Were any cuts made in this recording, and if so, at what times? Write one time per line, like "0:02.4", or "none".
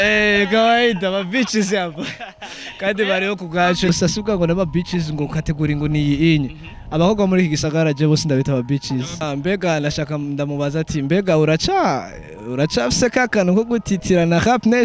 0:03.9
0:09.2